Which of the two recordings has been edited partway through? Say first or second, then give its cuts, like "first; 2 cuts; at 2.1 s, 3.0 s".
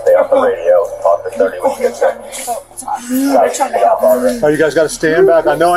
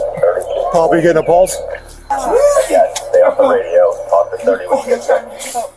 second; 1 cut; at 2.1 s